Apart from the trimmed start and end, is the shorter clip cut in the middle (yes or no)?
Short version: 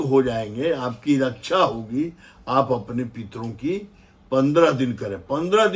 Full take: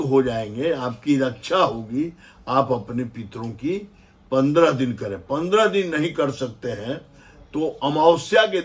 no